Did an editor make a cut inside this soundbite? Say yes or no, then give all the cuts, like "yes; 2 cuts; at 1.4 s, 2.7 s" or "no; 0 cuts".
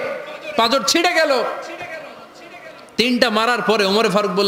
no; 0 cuts